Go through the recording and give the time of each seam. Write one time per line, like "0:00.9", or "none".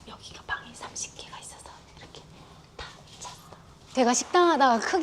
0:04.0